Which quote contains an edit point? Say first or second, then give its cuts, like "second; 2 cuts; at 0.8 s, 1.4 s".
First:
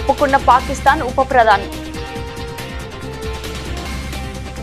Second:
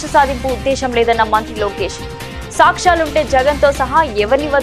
first; 1 cut; at 1.6 s